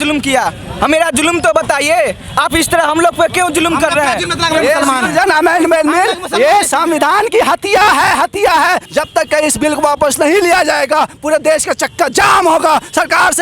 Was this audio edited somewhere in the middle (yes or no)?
yes